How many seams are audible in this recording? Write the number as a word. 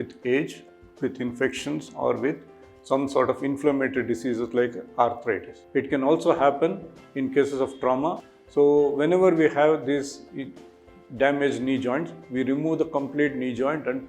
one